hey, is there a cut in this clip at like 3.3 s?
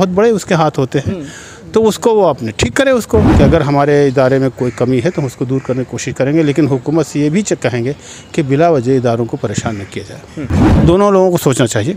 yes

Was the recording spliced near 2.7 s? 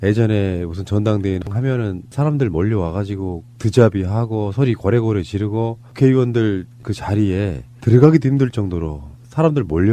yes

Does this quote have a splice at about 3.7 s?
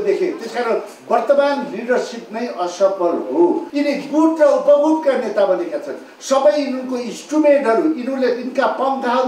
yes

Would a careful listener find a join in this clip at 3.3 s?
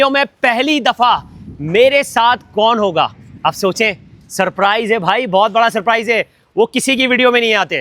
no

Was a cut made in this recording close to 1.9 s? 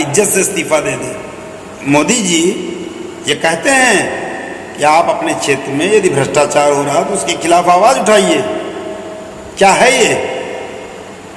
yes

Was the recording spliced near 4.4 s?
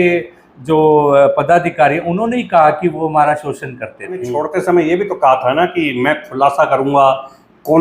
yes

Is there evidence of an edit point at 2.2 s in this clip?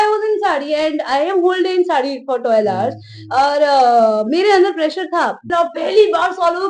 no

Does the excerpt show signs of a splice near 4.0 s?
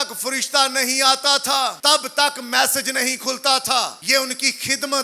yes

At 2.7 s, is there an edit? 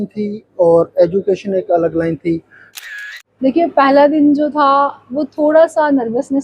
yes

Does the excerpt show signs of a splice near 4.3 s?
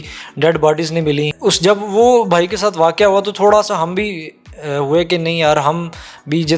no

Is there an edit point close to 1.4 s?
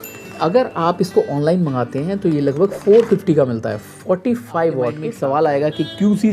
no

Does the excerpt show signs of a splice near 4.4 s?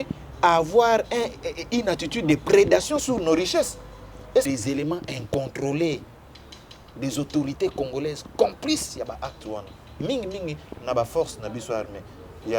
yes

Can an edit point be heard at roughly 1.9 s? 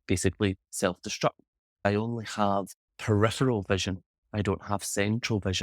yes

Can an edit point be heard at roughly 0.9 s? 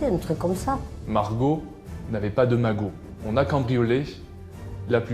yes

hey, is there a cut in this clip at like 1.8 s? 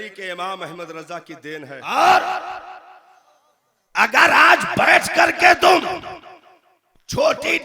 yes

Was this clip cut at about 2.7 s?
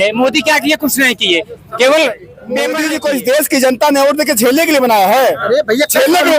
yes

